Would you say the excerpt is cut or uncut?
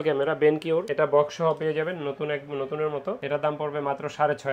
uncut